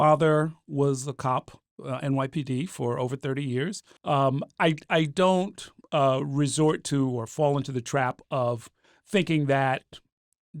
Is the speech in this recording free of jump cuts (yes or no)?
no